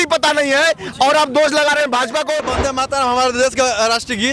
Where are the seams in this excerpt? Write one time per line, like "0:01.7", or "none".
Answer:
0:02.4